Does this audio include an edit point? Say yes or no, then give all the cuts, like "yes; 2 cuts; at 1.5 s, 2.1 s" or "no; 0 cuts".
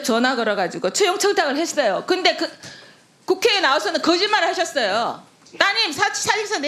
no; 0 cuts